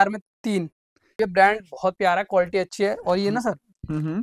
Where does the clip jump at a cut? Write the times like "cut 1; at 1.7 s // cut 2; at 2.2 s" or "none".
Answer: cut 1; at 1.2 s